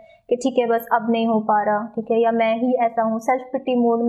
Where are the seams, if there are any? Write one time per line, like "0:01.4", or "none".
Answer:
none

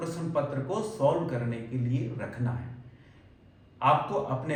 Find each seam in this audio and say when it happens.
none

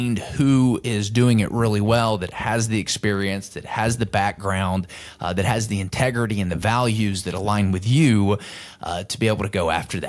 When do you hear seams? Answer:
none

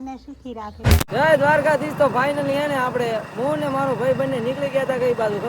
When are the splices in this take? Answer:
0:01.1

